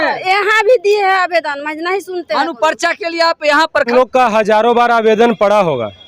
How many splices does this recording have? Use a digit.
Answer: 1